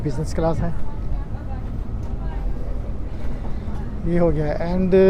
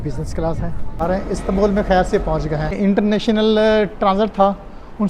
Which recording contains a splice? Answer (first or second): second